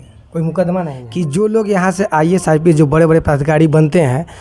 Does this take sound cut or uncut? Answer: cut